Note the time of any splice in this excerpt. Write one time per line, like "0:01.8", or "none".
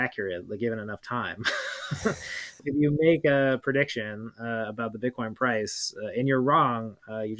0:02.6